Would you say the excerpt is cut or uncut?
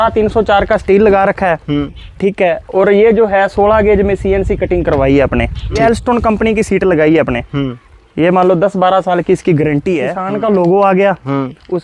cut